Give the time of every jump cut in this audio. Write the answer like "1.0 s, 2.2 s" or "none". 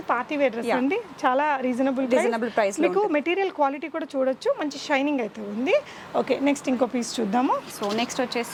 none